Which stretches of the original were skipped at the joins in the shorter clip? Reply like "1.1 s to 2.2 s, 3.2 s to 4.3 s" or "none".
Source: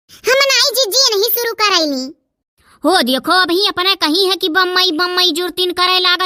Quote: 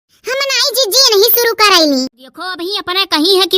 2.7 s to 3.6 s